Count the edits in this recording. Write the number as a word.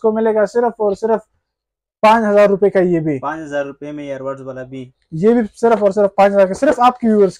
zero